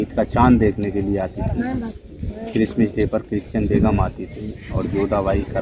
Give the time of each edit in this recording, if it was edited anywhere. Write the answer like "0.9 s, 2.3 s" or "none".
none